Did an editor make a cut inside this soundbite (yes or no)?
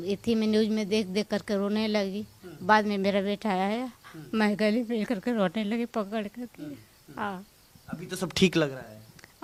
no